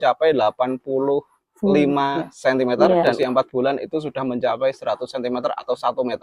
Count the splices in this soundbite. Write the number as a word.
one